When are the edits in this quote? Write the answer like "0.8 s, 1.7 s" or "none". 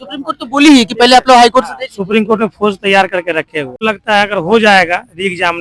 3.8 s